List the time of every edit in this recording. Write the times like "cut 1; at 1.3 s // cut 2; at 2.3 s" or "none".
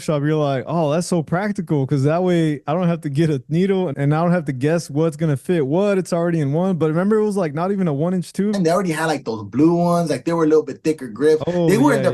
cut 1; at 3.9 s // cut 2; at 8.5 s

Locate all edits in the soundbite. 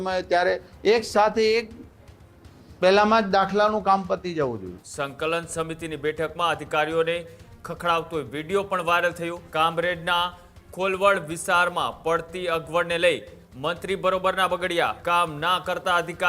cut 1; at 4.8 s // cut 2; at 9.4 s // cut 3; at 15.0 s

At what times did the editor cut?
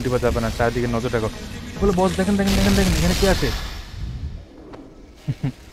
none

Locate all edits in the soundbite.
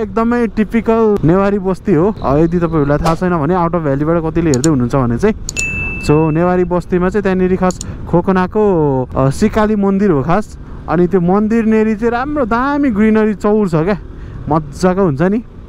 cut 1; at 1.2 s // cut 2; at 2.2 s // cut 3; at 9.1 s

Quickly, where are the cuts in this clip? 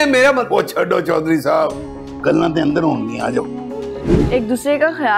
cut 1; at 4.1 s

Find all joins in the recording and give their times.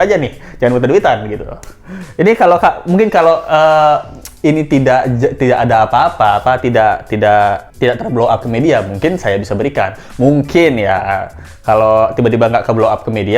none

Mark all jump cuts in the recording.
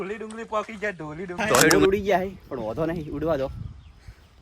cut 1; at 1.7 s

